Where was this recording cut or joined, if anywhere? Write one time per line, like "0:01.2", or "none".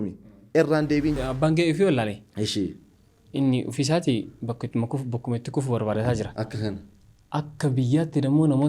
0:01.2